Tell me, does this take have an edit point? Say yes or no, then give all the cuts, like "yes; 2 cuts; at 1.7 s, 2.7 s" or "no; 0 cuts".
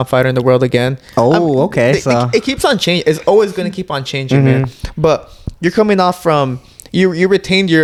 no; 0 cuts